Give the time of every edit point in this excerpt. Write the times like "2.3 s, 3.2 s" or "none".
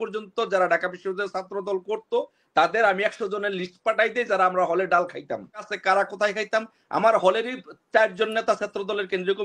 5.7 s